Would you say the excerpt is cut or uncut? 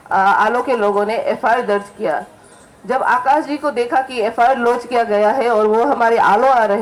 uncut